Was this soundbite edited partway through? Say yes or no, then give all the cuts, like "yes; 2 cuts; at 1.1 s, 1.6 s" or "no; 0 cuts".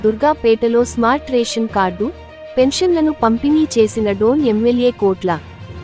no; 0 cuts